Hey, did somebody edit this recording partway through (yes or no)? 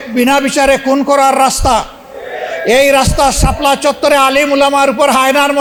no